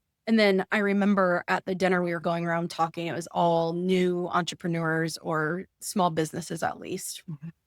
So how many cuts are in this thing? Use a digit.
1